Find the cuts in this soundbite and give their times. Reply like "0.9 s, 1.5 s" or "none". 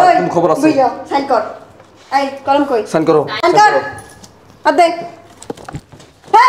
3.4 s